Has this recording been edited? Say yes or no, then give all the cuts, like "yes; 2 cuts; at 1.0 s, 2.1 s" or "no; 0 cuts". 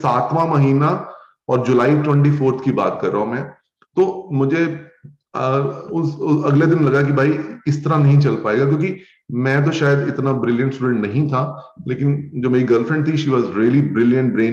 no; 0 cuts